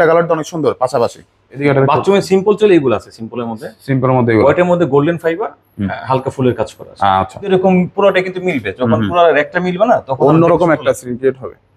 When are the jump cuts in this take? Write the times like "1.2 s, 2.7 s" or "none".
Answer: 1.6 s, 7.5 s